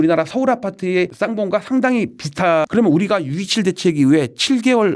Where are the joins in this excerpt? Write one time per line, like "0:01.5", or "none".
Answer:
none